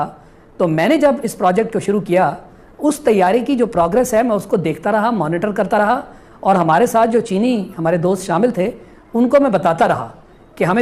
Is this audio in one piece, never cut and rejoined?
yes; 0 cuts

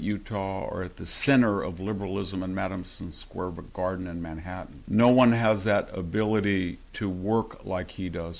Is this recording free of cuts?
no; 2 cuts; at 4.7 s, 6.8 s

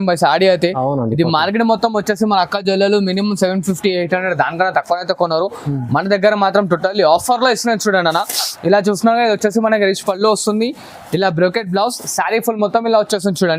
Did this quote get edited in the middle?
no; 0 cuts

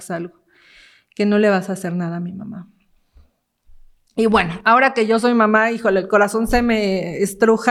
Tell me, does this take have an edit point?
no; 0 cuts

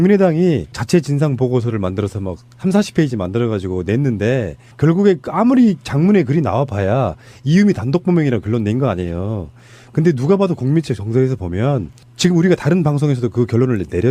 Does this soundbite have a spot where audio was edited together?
yes; 1 cut; at 12.6 s

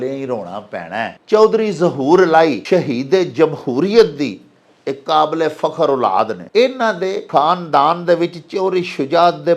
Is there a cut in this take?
yes; 4 cuts; at 1.2 s, 2.6 s, 6.4 s, 7.2 s

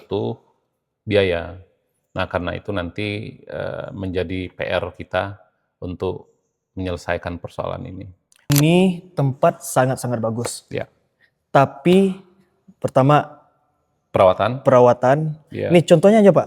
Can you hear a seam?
yes; 1 cut; at 8.5 s

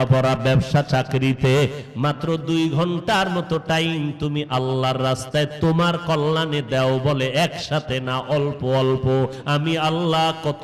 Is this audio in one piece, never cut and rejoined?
no; 1 cut; at 9.4 s

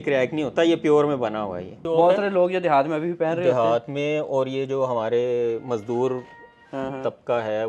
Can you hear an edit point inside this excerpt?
yes; 1 cut; at 1.8 s

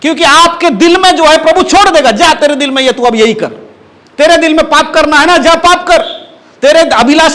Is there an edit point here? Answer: no; 0 cuts

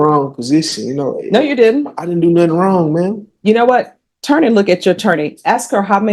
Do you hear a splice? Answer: no; 0 cuts

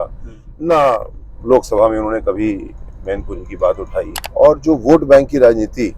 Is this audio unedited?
no; 1 cut; at 4.2 s

